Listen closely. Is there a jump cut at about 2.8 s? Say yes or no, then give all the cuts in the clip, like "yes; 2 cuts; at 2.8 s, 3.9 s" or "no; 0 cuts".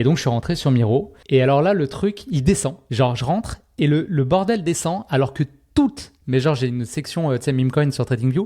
yes; 2 cuts; at 1.2 s, 2.8 s